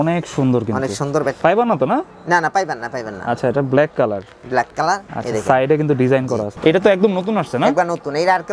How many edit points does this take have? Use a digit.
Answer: 2